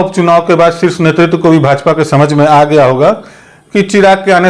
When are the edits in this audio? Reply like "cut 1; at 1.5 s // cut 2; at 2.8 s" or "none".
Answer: none

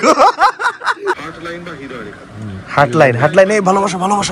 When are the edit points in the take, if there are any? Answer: cut 1; at 1.3 s

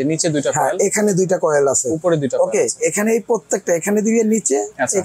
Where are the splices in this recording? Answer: none

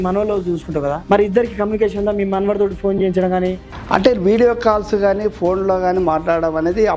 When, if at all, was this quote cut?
cut 1; at 1.0 s // cut 2; at 3.7 s

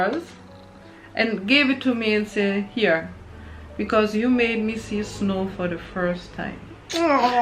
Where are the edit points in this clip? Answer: none

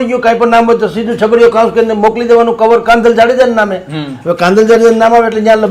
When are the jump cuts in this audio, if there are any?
none

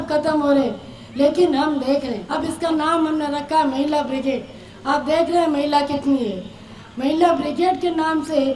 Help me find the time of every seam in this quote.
cut 1; at 2.2 s

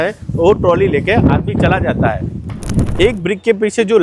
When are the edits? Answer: cut 1; at 2.8 s

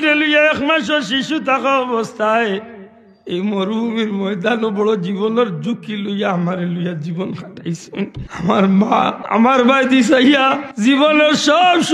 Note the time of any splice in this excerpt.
cut 1; at 8.2 s // cut 2; at 9.2 s // cut 3; at 10.7 s

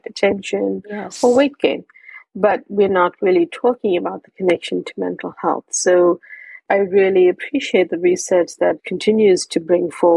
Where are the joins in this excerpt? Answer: cut 1; at 6.6 s // cut 2; at 8.9 s

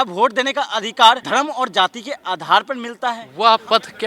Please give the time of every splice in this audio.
cut 1; at 1.2 s // cut 2; at 3.3 s

